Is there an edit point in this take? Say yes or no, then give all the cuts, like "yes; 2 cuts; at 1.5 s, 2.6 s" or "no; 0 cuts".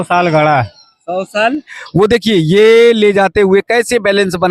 yes; 1 cut; at 1.8 s